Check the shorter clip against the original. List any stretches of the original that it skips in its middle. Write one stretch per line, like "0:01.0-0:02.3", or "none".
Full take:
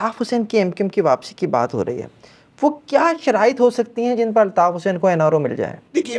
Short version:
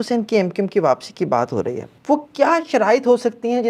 0:02.1-0:02.4